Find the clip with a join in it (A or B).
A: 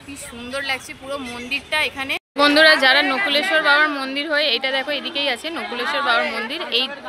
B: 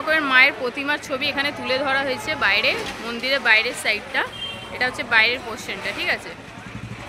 A